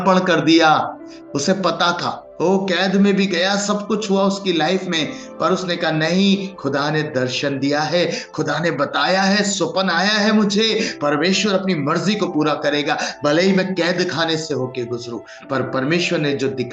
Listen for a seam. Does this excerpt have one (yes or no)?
yes